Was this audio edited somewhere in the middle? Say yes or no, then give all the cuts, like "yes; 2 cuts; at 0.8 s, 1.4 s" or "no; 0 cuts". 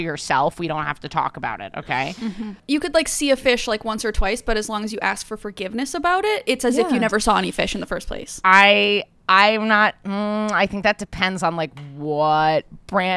yes; 1 cut; at 2.6 s